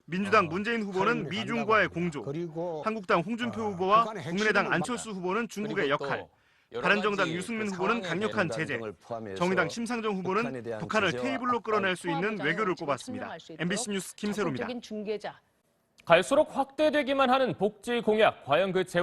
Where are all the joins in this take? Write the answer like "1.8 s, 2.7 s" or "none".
5.1 s